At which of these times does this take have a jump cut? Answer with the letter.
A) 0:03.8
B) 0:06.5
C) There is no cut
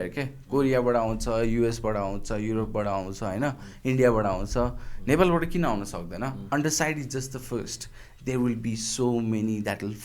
B